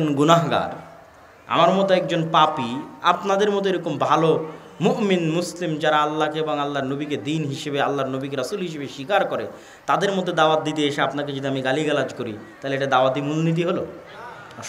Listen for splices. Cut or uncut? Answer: uncut